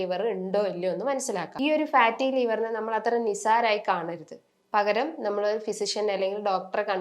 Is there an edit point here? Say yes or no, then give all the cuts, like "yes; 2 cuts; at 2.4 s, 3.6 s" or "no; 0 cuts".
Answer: yes; 1 cut; at 1.5 s